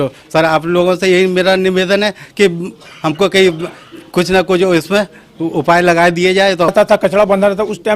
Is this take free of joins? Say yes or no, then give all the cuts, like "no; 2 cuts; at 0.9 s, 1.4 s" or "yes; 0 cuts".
no; 1 cut; at 6.7 s